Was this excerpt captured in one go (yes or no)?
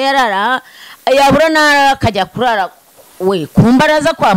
yes